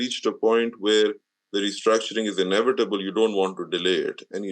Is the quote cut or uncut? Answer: uncut